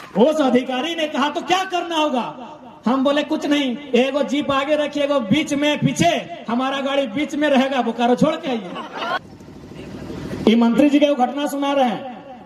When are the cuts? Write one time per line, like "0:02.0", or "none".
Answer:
0:09.2